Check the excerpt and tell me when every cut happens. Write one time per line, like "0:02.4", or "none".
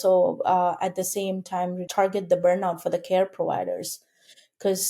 0:01.8